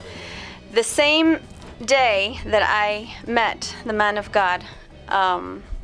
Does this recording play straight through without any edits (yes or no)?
yes